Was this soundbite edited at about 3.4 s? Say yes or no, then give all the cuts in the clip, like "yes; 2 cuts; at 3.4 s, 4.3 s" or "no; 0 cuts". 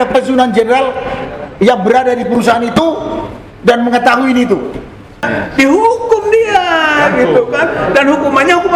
no; 1 cut; at 5.3 s